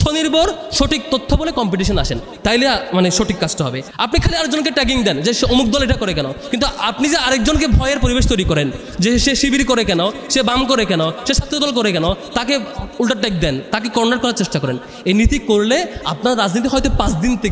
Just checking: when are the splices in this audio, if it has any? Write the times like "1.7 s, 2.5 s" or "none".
3.9 s